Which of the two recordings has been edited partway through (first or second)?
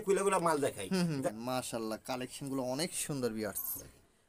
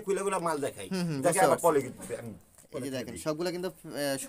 first